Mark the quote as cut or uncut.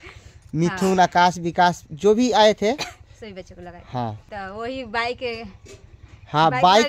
cut